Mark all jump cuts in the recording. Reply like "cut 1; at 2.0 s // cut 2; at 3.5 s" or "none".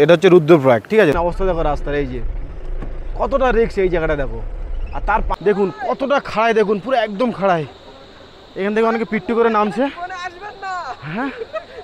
cut 1; at 1.2 s // cut 2; at 5.3 s